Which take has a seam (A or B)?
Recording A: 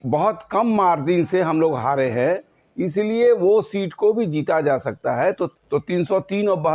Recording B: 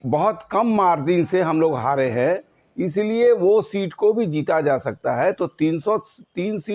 A